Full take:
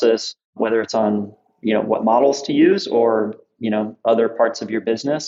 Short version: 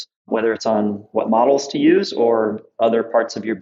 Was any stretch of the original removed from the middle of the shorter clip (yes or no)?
yes